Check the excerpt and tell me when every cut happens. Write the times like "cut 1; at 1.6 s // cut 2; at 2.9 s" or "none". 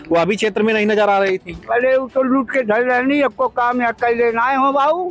none